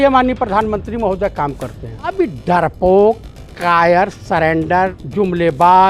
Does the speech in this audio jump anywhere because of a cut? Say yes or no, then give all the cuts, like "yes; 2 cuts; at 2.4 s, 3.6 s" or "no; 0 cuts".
yes; 2 cuts; at 2.1 s, 5.0 s